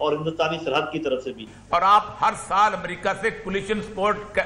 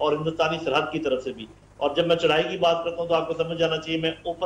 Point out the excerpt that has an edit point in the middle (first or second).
first